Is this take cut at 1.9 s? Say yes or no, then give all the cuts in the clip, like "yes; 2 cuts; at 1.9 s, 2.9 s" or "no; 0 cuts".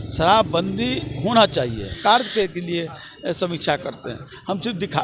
yes; 1 cut; at 1.9 s